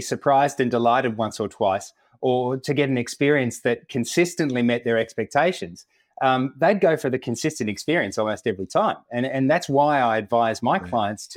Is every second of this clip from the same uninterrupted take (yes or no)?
yes